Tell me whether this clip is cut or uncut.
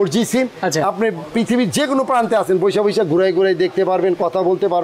uncut